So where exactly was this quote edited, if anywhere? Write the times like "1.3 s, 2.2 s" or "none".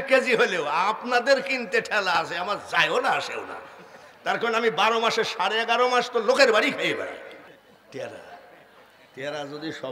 7.5 s

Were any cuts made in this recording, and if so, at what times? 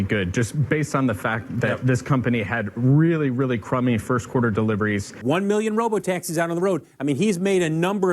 5.1 s

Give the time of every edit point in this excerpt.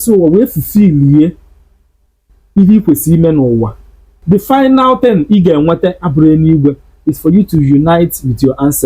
4.2 s

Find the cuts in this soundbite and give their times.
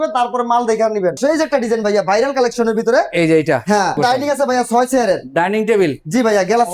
1.2 s, 4.0 s

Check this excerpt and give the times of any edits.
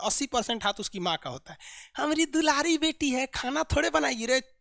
none

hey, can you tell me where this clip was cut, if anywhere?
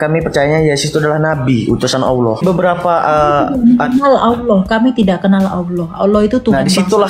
2.4 s

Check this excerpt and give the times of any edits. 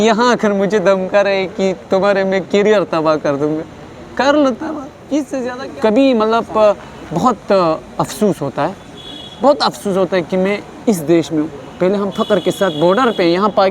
5.4 s

